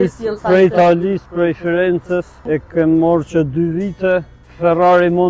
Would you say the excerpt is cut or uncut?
cut